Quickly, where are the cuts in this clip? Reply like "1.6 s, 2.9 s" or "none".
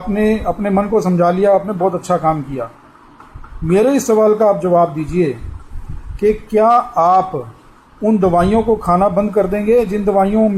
none